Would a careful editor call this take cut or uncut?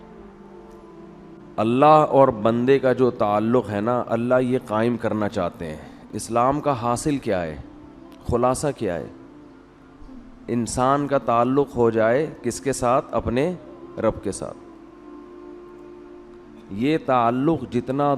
cut